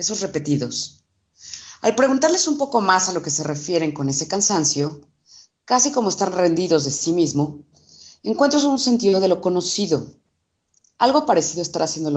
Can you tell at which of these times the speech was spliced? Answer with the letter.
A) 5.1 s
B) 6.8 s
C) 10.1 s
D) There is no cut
C